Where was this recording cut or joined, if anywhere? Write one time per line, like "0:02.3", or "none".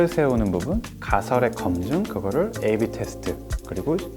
0:00.9
0:02.1